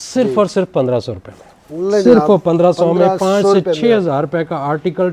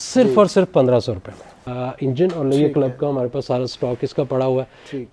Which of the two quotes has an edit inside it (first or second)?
second